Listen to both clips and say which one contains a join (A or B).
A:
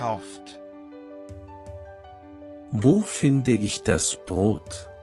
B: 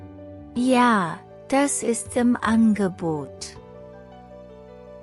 B